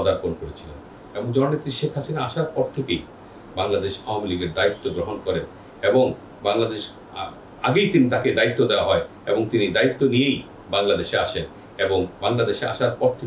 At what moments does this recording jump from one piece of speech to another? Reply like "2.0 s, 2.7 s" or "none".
none